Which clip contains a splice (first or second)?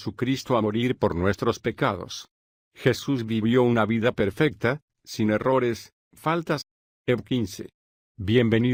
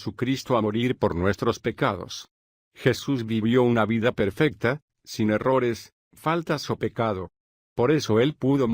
second